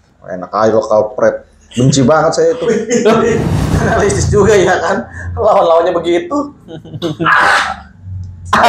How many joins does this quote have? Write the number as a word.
one